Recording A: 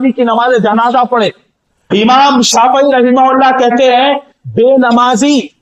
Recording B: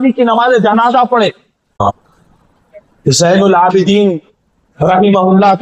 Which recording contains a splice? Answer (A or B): B